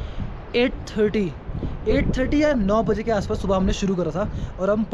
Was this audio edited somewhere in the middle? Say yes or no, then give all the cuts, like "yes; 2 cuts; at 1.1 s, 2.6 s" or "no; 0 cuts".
no; 0 cuts